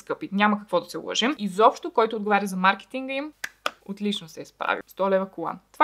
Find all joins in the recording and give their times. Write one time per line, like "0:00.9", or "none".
0:01.4
0:04.9